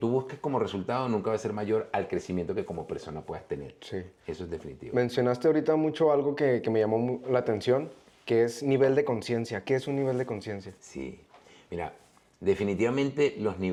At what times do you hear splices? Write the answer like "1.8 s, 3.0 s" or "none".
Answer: none